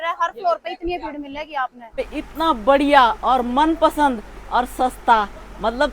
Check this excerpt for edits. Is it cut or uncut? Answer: cut